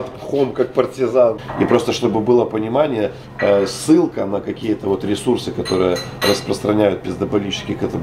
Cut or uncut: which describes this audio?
cut